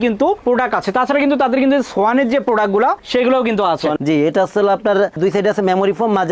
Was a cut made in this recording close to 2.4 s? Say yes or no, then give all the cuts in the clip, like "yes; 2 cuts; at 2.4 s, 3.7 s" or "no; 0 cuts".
no; 1 cut; at 4.0 s